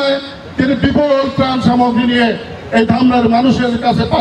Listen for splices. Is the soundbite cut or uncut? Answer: uncut